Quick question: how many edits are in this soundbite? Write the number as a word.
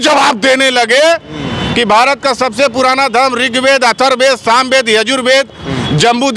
zero